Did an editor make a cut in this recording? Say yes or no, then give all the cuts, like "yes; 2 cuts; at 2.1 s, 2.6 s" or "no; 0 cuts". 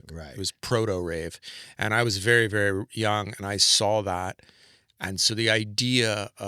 no; 0 cuts